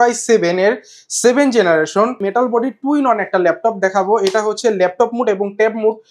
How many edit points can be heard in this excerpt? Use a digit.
1